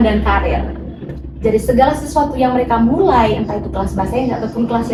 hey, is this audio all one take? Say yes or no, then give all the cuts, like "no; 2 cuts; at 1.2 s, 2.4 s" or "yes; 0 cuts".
yes; 0 cuts